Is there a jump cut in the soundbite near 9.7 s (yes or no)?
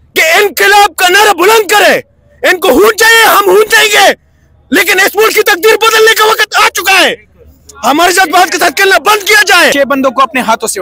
yes